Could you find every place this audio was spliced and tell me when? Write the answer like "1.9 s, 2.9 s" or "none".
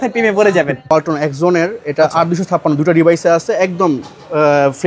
0.9 s